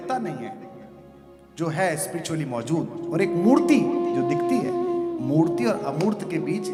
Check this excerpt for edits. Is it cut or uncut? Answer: uncut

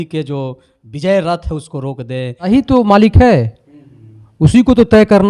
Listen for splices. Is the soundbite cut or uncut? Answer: cut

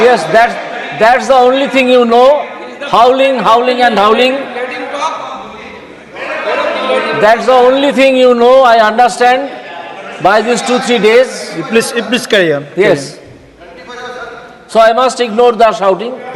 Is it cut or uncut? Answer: uncut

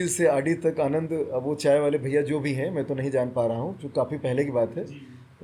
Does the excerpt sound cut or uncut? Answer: uncut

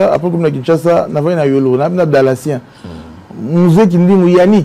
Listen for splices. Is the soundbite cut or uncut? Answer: uncut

